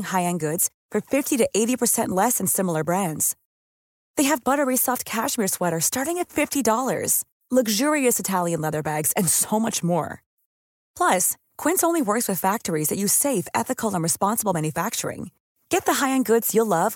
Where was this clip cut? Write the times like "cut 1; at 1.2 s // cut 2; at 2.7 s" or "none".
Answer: none